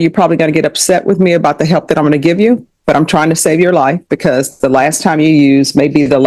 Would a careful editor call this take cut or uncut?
uncut